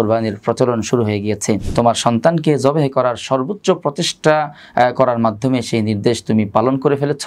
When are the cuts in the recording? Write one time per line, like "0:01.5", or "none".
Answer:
0:01.7